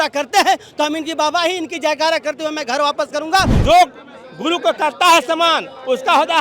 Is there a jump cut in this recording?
yes; 1 cut; at 3.5 s

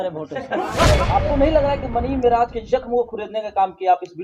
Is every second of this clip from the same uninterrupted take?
no; 1 cut; at 1.1 s

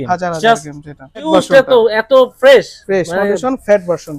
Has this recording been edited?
yes; 1 cut; at 1.3 s

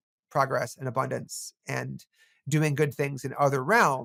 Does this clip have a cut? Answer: no; 0 cuts

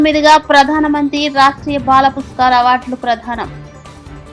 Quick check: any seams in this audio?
no; 0 cuts

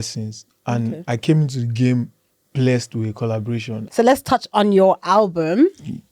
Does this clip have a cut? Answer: yes; 1 cut; at 3.8 s

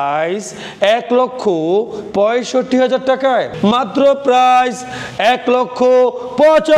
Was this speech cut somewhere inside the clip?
yes; 1 cut; at 3.5 s

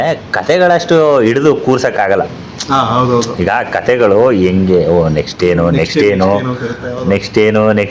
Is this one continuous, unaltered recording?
yes; 0 cuts

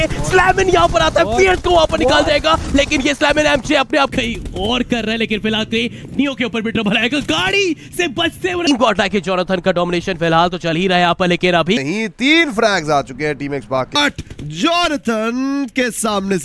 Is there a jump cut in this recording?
yes; 4 cuts; at 4.1 s, 8.6 s, 11.8 s, 14.0 s

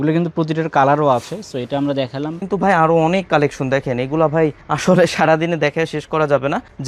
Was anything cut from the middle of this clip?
yes; 1 cut; at 2.4 s

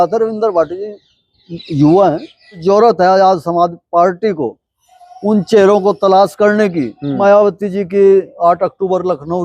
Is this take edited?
yes; 2 cuts; at 2.6 s, 7.2 s

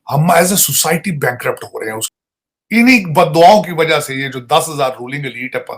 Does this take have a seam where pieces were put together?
yes; 1 cut; at 2.1 s

